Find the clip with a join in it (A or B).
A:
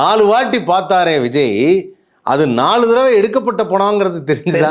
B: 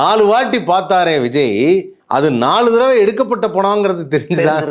B